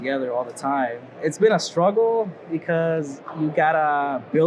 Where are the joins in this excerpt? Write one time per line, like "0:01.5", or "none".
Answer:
0:01.1
0:03.2